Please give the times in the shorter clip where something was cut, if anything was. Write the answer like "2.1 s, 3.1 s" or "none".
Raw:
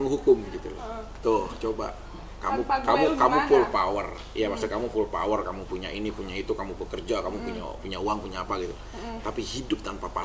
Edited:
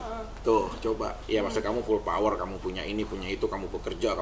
1.1 s